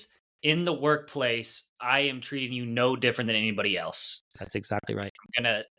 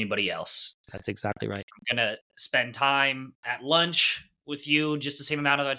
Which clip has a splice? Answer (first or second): second